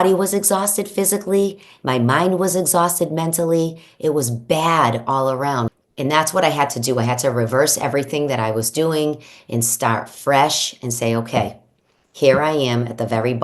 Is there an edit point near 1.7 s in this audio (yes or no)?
no